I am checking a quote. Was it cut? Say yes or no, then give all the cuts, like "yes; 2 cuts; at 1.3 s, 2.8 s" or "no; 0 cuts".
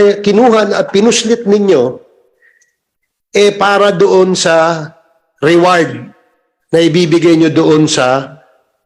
no; 0 cuts